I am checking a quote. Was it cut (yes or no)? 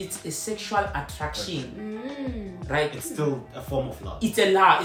no